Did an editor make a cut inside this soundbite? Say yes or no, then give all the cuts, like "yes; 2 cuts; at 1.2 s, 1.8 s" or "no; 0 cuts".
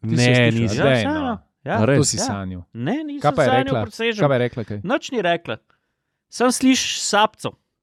no; 0 cuts